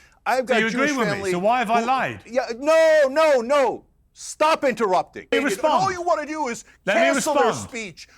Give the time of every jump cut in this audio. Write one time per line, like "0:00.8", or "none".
0:05.3